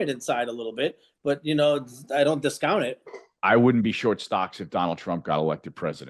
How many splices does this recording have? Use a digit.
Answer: 1